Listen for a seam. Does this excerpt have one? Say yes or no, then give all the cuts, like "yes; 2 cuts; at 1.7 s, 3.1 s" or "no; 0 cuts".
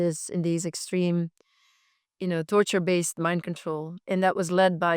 yes; 1 cut; at 4.0 s